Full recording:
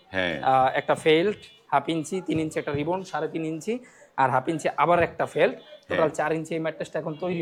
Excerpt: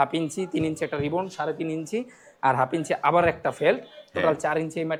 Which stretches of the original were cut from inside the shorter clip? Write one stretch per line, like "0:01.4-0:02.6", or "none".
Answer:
none